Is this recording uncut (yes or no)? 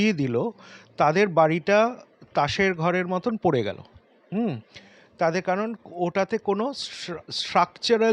yes